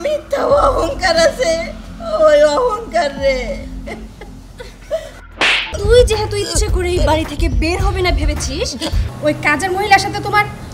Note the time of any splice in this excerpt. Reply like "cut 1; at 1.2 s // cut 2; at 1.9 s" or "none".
cut 1; at 5.7 s // cut 2; at 9.0 s